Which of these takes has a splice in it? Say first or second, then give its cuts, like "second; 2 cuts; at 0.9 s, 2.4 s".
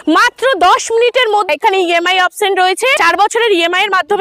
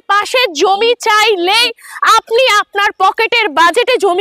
first; 2 cuts; at 1.5 s, 2.9 s